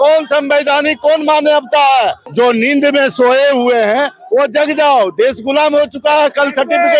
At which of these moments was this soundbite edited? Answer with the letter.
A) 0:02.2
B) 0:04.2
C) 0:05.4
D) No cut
A